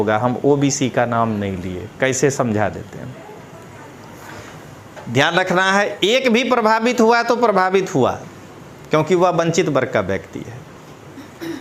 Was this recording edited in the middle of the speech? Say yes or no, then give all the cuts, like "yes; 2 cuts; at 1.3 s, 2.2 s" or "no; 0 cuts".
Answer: no; 0 cuts